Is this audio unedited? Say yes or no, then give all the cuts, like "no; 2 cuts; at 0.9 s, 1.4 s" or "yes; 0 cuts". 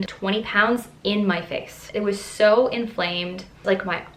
yes; 0 cuts